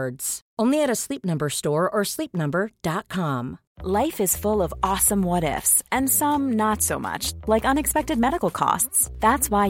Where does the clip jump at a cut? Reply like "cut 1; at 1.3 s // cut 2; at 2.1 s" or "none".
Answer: cut 1; at 3.7 s